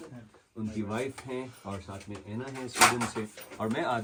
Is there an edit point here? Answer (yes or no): no